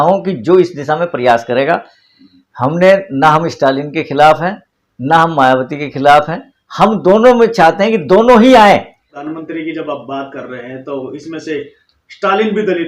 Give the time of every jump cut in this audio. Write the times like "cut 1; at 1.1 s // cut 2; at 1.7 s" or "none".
cut 1; at 9.1 s

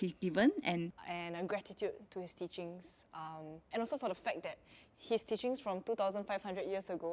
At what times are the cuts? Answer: cut 1; at 1.0 s

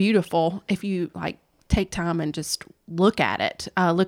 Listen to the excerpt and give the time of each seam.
none

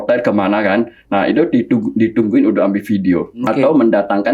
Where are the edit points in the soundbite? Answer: cut 1; at 3.3 s

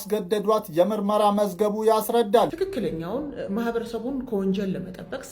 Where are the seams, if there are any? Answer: cut 1; at 2.5 s

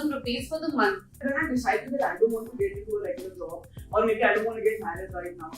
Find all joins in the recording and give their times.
cut 1; at 1.1 s

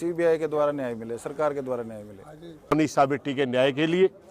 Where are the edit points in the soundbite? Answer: cut 1; at 3.0 s

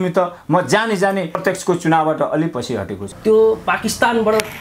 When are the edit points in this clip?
cut 1; at 1.4 s // cut 2; at 3.0 s

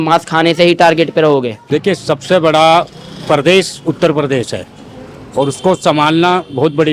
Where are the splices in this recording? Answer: cut 1; at 1.6 s

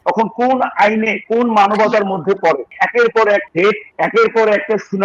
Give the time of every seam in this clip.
cut 1; at 2.7 s // cut 2; at 3.7 s

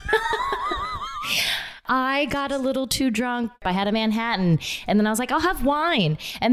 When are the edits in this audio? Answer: cut 1; at 1.8 s // cut 2; at 3.5 s

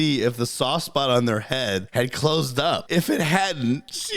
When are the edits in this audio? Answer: cut 1; at 1.9 s // cut 2; at 2.8 s

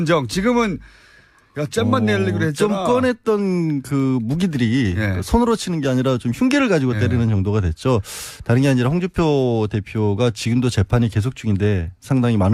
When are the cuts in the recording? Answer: none

